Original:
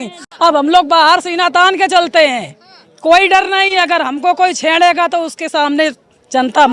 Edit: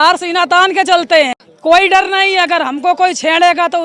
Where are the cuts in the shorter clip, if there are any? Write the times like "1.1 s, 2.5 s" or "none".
1.5 s